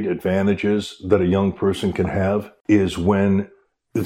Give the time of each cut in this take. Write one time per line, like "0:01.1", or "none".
0:02.5